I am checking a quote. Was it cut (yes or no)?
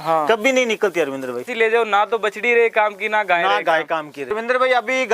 yes